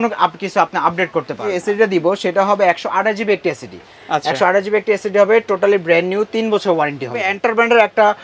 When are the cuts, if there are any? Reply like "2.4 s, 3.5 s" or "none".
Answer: 1.5 s, 7.3 s